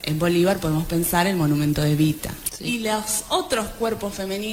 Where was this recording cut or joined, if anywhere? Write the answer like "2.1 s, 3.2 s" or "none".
2.4 s